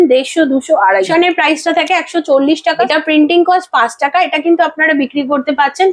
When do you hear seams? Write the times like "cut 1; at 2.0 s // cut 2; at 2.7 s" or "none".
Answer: cut 1; at 1.1 s // cut 2; at 2.9 s